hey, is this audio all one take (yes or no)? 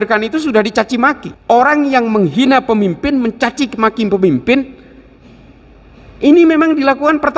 no